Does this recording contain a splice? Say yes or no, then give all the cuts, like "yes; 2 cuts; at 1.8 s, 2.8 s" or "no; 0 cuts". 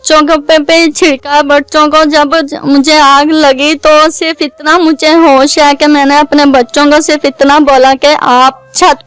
no; 0 cuts